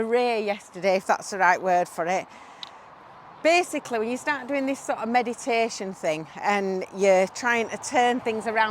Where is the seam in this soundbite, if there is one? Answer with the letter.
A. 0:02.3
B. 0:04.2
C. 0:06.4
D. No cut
D